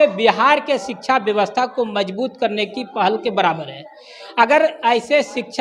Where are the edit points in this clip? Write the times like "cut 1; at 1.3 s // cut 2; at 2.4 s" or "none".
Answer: none